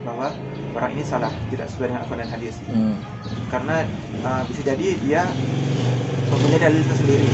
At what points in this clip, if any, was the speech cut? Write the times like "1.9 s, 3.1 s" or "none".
none